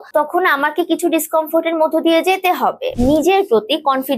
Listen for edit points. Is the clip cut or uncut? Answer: cut